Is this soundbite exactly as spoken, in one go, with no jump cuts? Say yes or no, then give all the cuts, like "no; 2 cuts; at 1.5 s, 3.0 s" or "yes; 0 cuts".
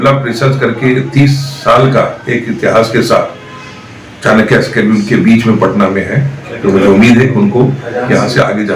yes; 0 cuts